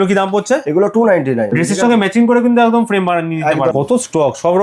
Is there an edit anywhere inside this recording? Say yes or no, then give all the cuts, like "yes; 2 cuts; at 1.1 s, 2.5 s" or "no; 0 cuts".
yes; 2 cuts; at 1.5 s, 3.7 s